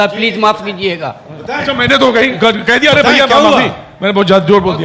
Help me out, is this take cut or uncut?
uncut